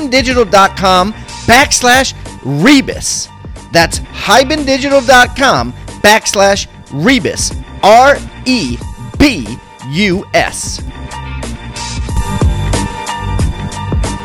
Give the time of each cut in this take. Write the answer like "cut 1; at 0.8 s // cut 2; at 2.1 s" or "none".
cut 1; at 10.6 s